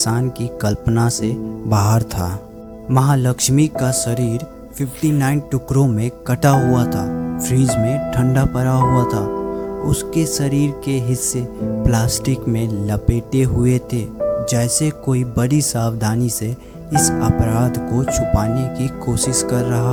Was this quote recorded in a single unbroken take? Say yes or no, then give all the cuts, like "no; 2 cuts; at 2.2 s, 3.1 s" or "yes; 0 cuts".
yes; 0 cuts